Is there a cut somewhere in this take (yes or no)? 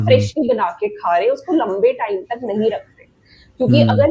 no